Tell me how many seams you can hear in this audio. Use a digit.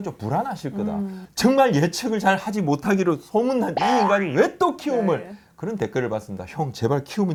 0